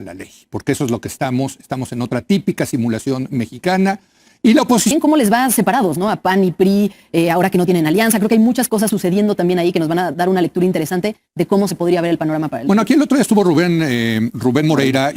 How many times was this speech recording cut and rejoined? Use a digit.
1